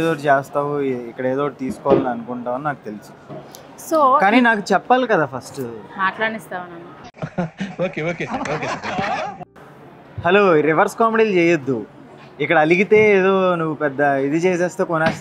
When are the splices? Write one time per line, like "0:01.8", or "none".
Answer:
none